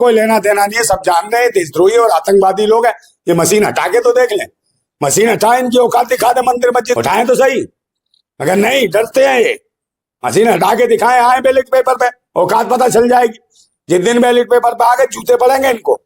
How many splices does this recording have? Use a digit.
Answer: 1